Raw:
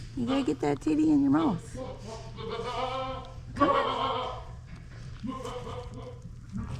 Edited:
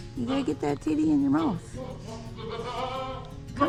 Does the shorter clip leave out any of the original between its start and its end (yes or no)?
no